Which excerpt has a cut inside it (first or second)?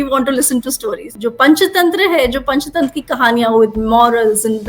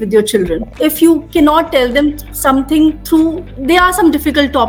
first